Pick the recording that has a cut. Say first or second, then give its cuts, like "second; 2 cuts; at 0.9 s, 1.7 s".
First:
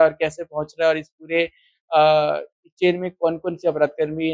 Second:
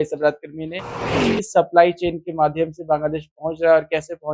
second; 1 cut; at 1.1 s